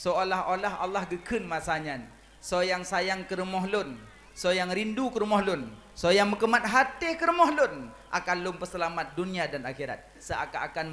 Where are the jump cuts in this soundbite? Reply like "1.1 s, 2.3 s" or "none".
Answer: none